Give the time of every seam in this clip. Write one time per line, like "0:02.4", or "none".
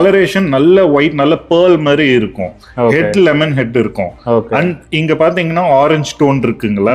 none